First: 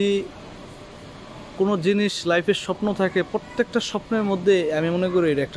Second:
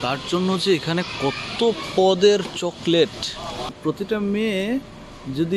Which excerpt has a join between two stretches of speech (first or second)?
second